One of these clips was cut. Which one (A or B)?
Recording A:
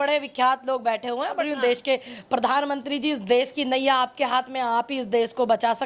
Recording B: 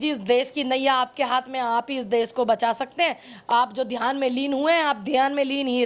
A